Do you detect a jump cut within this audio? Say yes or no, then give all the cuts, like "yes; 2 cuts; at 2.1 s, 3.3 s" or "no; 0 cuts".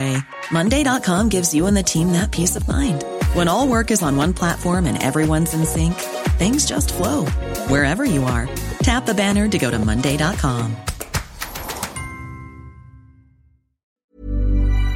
yes; 1 cut; at 14.0 s